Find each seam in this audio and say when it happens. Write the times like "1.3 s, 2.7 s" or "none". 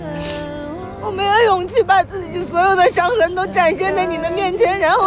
0.9 s